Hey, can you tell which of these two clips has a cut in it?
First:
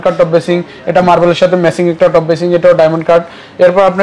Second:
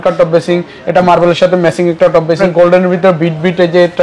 second; 1 cut; at 2.4 s

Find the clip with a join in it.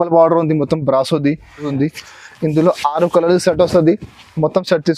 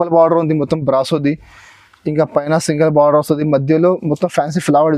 first; 1 cut; at 1.7 s

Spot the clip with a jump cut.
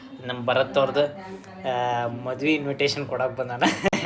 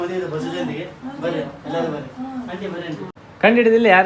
second; 1 cut; at 3.1 s

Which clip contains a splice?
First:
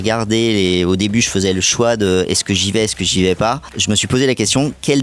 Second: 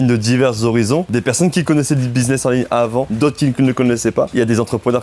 second; 3 cuts; at 1.1 s, 3.1 s, 4.3 s

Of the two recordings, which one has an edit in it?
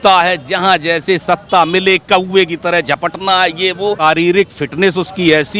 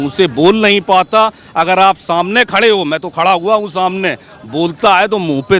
first; 1 cut; at 4.0 s

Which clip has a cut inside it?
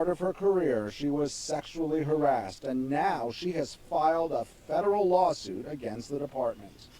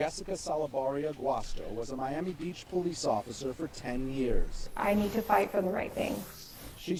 first; 1 cut; at 0.9 s

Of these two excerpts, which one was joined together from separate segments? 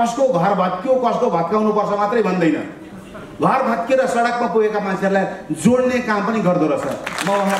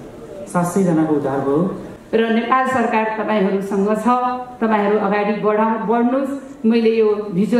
second; 1 cut; at 1.9 s

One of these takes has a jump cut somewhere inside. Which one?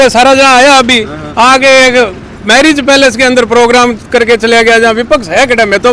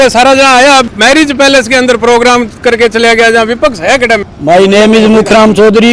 second; 2 cuts; at 0.9 s, 4.2 s

